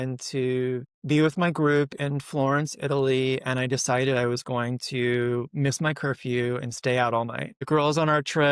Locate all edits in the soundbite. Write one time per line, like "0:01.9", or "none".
0:00.9
0:07.5